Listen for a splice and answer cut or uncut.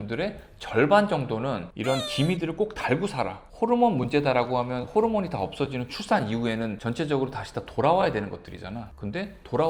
uncut